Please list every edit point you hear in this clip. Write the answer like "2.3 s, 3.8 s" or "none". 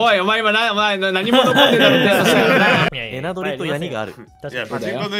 2.9 s